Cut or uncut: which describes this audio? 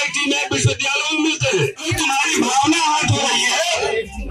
cut